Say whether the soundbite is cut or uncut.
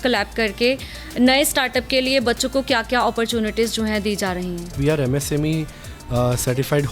cut